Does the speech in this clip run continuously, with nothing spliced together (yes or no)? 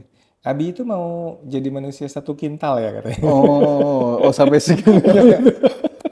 yes